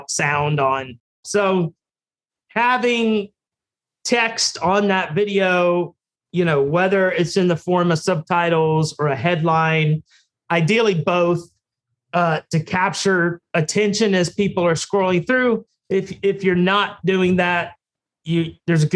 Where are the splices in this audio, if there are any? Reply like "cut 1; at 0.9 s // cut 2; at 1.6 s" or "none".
cut 1; at 1.2 s